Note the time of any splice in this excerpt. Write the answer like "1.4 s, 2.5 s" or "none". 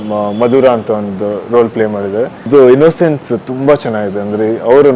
2.4 s